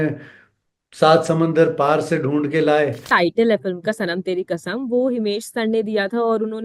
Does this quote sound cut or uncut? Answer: cut